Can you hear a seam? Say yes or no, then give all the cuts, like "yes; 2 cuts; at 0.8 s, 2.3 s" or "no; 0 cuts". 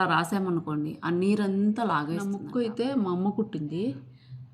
yes; 1 cut; at 2.1 s